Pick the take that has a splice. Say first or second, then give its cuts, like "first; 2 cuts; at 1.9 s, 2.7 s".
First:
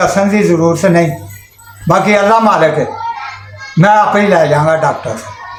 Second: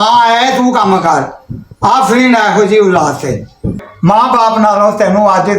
second; 1 cut; at 3.9 s